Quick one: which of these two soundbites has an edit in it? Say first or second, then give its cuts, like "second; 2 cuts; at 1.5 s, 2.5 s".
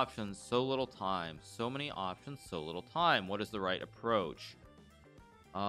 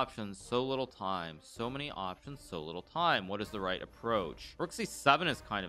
second; 1 cut; at 4.4 s